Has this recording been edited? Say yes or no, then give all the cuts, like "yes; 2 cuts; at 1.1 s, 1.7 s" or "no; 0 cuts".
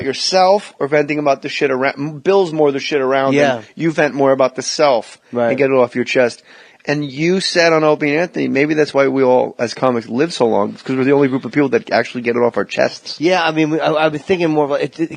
no; 0 cuts